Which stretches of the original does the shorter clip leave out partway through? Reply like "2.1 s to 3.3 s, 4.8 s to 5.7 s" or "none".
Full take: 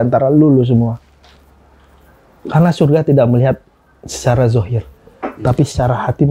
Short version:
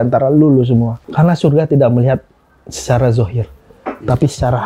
1.0 s to 2.4 s